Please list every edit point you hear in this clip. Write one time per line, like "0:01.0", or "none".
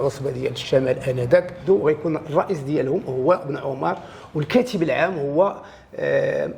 0:01.5